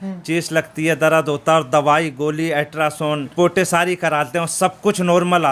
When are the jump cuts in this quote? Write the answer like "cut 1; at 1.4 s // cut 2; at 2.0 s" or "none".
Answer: cut 1; at 3.3 s